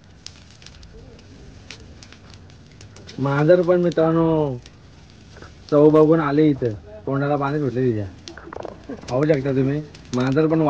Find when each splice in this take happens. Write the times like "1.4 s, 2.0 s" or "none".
7.6 s